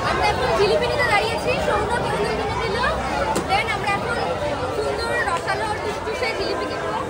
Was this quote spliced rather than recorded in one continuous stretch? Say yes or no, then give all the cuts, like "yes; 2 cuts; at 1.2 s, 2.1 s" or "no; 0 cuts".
no; 0 cuts